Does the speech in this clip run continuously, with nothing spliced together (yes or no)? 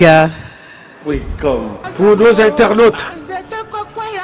yes